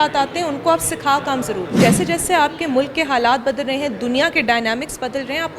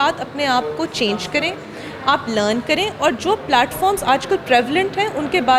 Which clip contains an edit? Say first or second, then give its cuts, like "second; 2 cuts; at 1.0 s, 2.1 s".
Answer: first; 1 cut; at 1.8 s